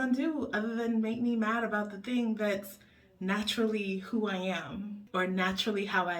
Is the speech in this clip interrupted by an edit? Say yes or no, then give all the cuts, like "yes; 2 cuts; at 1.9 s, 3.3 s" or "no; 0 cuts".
yes; 1 cut; at 5.0 s